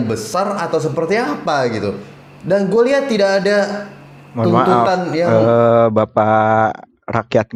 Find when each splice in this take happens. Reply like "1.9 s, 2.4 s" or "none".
none